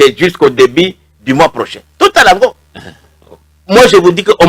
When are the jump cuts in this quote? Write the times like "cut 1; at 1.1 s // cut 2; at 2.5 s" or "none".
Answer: none